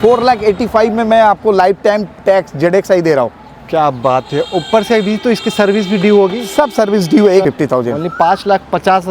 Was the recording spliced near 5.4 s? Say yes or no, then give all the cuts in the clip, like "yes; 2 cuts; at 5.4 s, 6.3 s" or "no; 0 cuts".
no; 1 cut; at 7.4 s